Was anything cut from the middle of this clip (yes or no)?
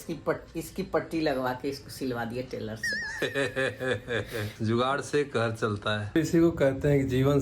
yes